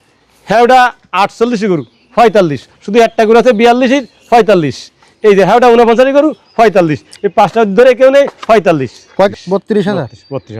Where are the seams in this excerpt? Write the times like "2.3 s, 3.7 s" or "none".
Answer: 9.3 s

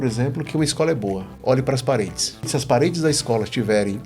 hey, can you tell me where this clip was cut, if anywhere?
1.4 s, 2.5 s

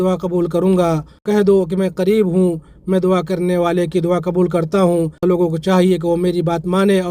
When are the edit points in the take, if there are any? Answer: 1.2 s, 5.2 s

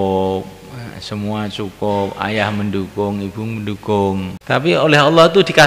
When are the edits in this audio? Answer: 4.6 s

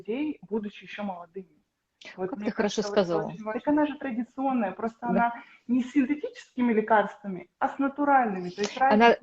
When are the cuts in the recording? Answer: 3.5 s

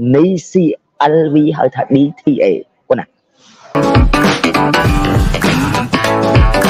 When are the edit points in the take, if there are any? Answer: 3.7 s

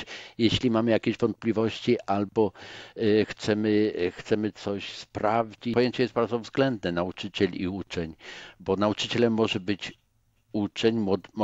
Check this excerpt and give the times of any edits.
5.7 s

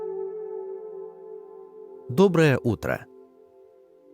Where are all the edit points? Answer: 2.1 s, 3.0 s

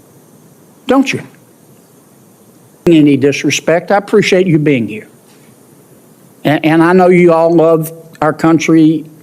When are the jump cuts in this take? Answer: 2.9 s

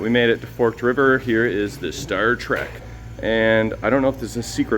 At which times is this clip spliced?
2.7 s

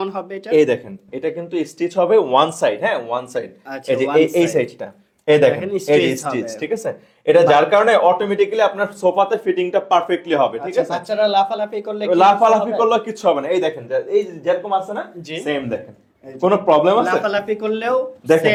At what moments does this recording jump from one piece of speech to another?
none

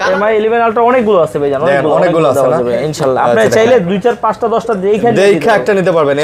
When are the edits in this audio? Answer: none

